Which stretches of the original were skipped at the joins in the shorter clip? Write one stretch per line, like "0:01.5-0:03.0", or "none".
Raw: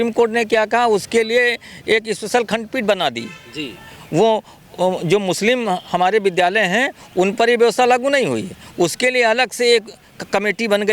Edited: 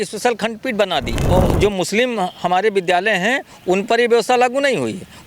0:03.2-0:04.6